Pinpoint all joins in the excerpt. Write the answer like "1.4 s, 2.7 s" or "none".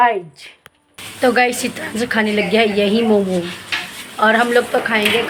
none